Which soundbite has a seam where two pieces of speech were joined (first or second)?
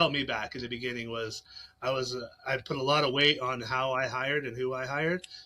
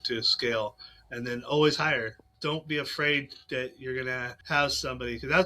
second